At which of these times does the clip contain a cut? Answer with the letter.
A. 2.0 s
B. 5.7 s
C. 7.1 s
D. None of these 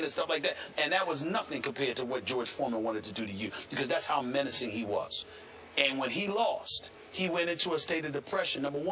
C